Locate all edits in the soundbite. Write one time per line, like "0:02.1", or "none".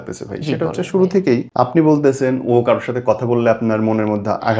0:01.5